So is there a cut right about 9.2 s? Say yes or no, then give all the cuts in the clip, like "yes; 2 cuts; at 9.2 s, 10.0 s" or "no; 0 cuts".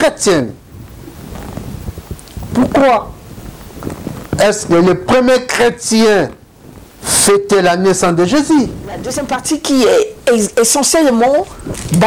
yes; 1 cut; at 9.2 s